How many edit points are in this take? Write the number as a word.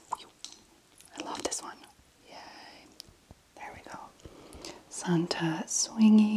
one